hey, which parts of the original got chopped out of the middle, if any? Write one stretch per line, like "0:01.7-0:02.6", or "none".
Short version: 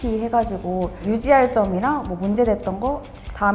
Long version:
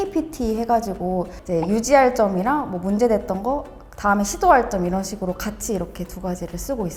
0:01.4-0:01.7

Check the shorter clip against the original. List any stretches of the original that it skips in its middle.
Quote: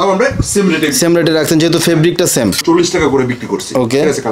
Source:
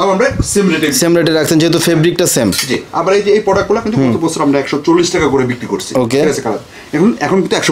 0:02.6-0:04.8

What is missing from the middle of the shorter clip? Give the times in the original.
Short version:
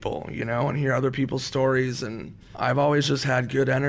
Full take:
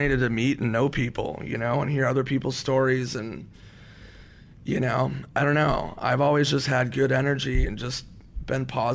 0:03.6-0:05.9

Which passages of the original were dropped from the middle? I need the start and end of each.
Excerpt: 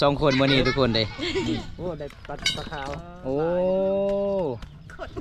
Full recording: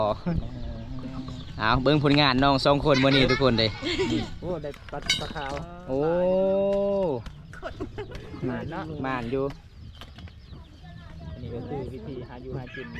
none

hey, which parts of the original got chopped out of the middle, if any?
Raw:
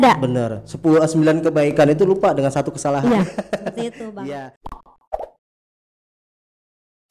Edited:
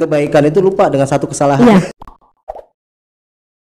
0:03.3-0:04.5

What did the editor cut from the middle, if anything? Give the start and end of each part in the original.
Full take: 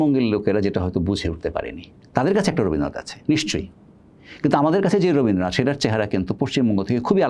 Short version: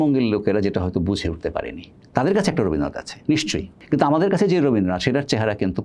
0:03.7-0:04.3

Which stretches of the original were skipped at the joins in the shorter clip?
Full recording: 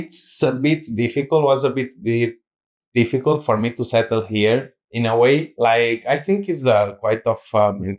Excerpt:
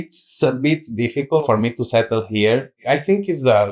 0:01.4-0:03.4
0:04.8-0:06.0

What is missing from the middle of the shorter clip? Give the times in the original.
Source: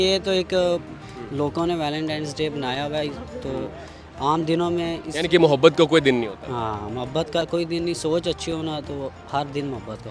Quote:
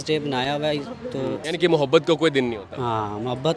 0:03.7-0:05.1

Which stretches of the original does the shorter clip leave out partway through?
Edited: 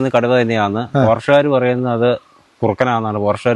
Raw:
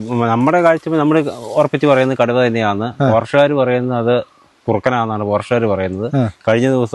none

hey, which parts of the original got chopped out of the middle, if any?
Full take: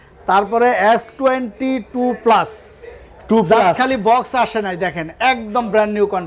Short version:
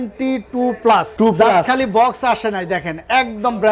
0:02.5-0:03.2

